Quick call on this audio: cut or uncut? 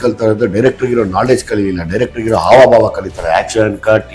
uncut